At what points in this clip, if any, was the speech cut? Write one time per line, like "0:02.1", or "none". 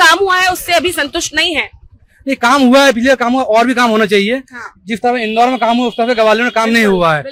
none